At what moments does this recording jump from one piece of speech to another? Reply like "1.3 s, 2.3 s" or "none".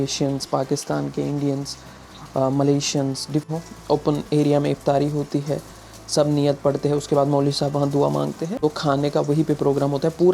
3.5 s, 8.5 s